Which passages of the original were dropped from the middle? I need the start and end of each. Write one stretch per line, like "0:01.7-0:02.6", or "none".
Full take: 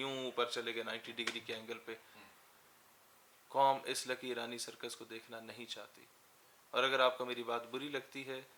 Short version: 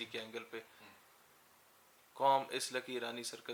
none